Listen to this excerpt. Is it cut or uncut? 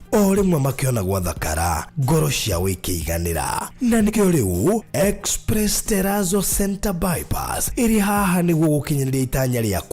cut